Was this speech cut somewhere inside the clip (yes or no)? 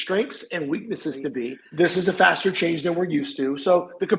yes